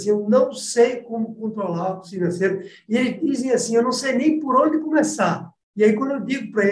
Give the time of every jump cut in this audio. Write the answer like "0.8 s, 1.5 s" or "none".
2.1 s

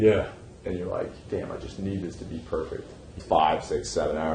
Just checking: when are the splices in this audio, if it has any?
3.2 s

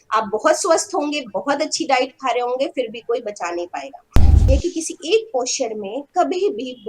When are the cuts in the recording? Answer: 4.4 s

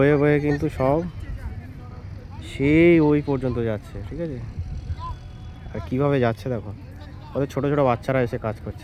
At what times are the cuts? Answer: none

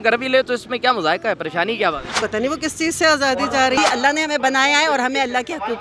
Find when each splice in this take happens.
2.1 s, 3.8 s

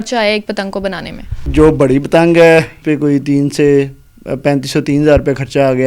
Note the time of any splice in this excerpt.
1.5 s, 2.8 s

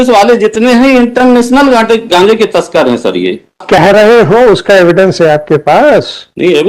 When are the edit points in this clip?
3.6 s

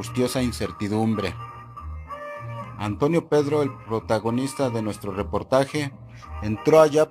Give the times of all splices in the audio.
3.4 s

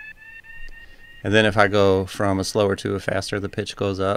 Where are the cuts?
none

